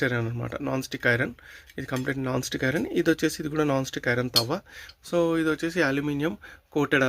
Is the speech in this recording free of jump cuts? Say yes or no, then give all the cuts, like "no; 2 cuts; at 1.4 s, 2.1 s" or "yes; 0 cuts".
yes; 0 cuts